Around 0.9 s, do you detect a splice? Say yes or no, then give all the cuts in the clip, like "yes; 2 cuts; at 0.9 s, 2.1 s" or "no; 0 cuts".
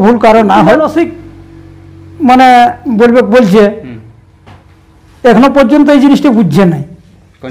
yes; 1 cut; at 0.9 s